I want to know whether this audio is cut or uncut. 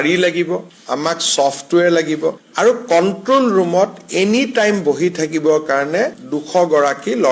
uncut